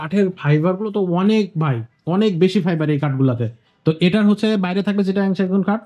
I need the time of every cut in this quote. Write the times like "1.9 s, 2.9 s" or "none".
none